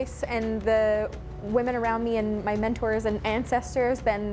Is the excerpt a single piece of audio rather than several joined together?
yes; 0 cuts

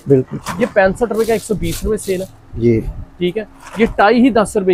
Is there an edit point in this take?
no; 0 cuts

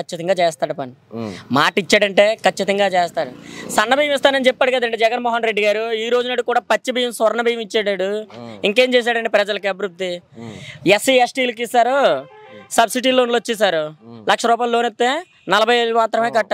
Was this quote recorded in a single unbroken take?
yes; 0 cuts

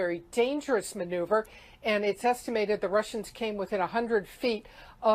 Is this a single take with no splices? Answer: no; 1 cut; at 4.0 s

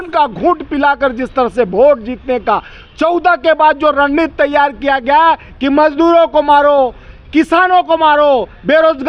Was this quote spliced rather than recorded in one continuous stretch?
no; 0 cuts

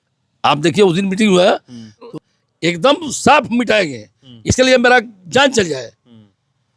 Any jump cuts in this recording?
yes; 1 cut; at 2.1 s

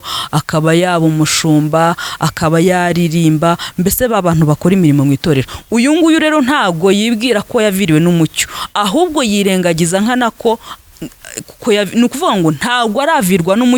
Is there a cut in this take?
no; 0 cuts

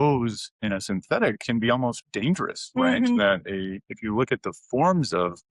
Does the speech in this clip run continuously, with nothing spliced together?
yes; 0 cuts

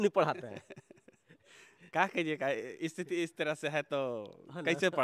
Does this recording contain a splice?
no; 0 cuts

